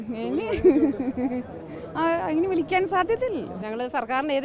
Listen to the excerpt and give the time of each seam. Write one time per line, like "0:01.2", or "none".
0:03.5